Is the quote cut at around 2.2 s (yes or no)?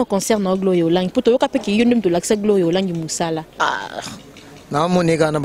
no